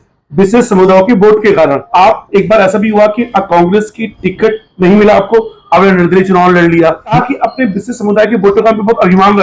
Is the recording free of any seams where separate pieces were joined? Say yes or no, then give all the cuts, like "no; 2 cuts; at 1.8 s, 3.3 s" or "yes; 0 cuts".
no; 2 cuts; at 1.8 s, 7.1 s